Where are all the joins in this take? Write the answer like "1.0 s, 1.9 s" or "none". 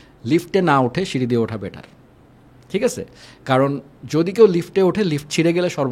none